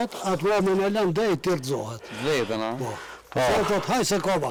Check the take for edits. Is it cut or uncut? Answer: uncut